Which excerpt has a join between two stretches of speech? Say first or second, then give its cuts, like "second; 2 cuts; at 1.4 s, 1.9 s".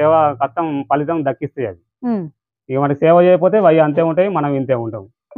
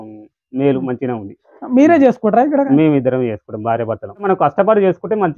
second; 1 cut; at 4.1 s